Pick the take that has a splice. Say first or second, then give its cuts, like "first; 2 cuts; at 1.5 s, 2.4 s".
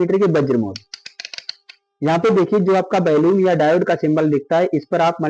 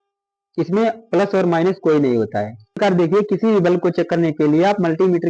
second; 1 cut; at 2.8 s